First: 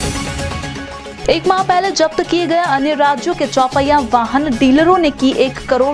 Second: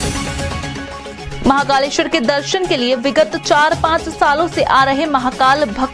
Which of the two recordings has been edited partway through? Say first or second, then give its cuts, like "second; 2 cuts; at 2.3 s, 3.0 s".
first; 1 cut; at 1.1 s